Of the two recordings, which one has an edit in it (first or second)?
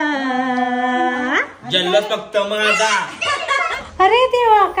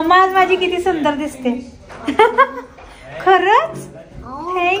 first